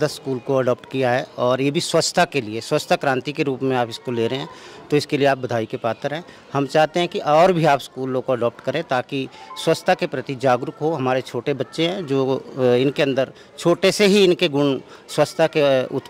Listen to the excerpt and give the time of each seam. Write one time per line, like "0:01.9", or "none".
none